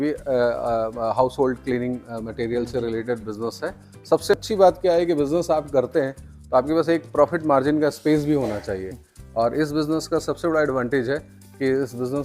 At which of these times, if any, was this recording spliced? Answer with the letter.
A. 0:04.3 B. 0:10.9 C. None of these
A